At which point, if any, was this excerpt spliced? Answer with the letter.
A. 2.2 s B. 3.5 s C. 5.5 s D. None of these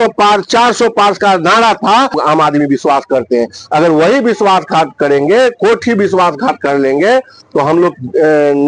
A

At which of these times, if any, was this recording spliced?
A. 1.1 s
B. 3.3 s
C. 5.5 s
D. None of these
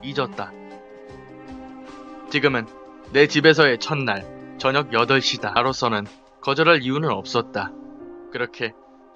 D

